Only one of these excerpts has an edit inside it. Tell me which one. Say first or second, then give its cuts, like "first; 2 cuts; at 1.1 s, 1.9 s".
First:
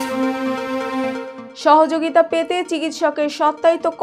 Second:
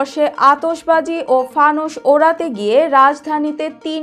first; 1 cut; at 1.3 s